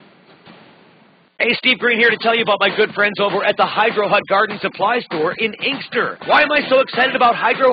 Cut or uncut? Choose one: uncut